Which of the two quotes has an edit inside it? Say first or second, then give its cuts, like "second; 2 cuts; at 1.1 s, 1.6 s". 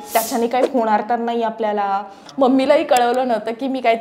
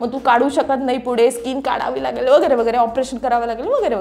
first; 1 cut; at 2.2 s